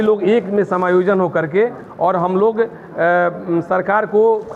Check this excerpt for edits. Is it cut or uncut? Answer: uncut